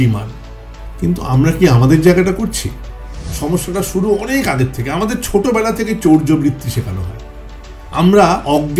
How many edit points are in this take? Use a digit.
1